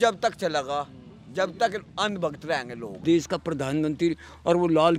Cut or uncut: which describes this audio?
cut